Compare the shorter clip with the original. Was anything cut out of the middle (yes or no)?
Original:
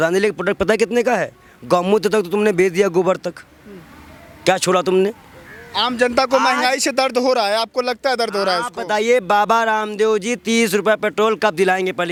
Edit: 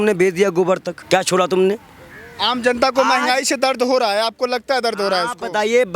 yes